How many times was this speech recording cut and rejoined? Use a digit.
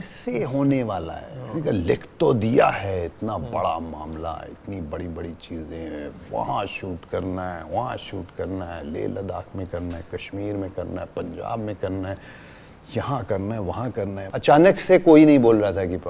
1